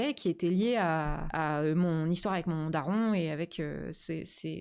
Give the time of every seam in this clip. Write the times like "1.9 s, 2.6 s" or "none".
1.2 s